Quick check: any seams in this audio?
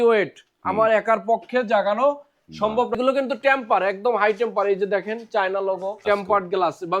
yes; 2 cuts; at 3.0 s, 6.0 s

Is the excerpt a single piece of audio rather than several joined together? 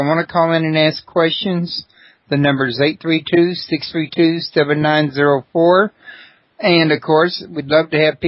yes; 0 cuts

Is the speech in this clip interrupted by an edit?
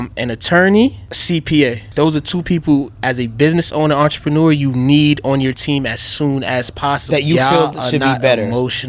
yes; 3 cuts; at 1.1 s, 1.8 s, 7.0 s

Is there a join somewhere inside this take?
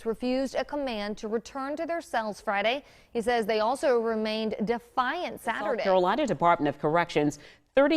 yes; 1 cut; at 5.8 s

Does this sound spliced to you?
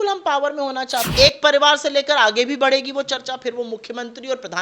yes; 1 cut; at 1.0 s

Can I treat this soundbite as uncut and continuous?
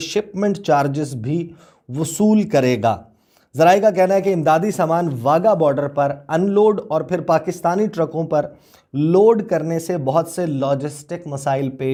yes; 0 cuts

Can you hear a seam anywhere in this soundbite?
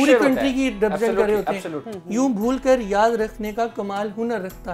yes; 1 cut; at 1.7 s

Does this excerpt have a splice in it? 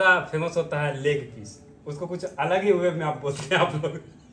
no; 0 cuts

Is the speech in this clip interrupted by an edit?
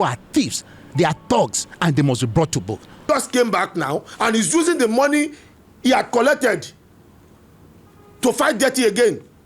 yes; 1 cut; at 3.0 s

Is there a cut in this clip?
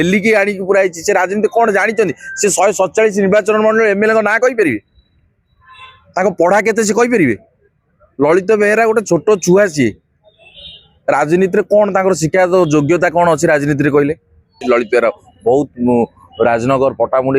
yes; 1 cut; at 14.6 s

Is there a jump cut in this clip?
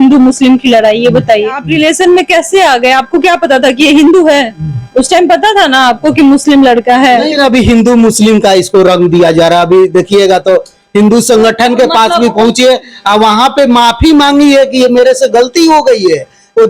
yes; 2 cuts; at 1.6 s, 7.3 s

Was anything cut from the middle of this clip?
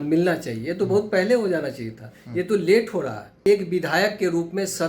yes; 1 cut; at 3.5 s

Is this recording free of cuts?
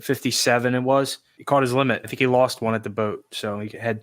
no; 1 cut; at 1.3 s

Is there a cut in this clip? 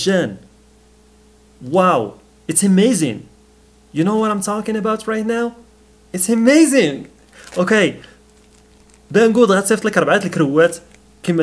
no; 0 cuts

